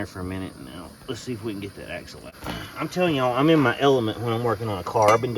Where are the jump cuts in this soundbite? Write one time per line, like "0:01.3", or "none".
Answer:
0:02.2